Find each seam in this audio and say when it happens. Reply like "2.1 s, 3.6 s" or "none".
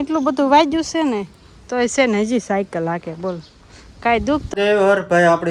4.5 s